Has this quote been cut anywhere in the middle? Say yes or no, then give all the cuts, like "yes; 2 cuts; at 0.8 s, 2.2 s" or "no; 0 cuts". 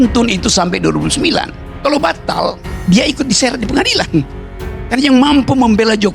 yes; 1 cut; at 1.6 s